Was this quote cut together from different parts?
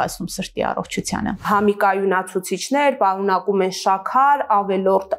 yes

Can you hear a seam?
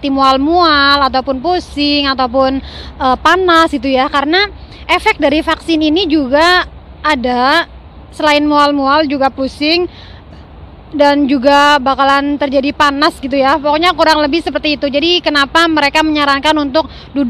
no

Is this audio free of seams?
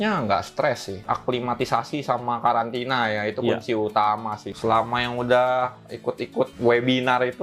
no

